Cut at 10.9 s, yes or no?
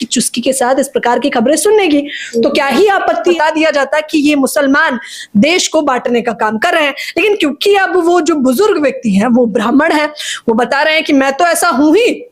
no